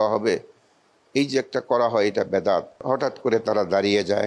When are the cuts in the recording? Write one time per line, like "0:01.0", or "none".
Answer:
0:02.8